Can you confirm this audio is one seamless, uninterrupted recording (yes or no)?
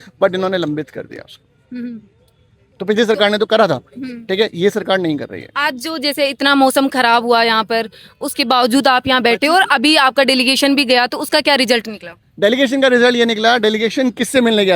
yes